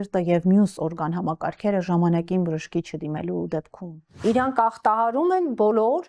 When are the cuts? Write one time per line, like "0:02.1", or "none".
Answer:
0:04.2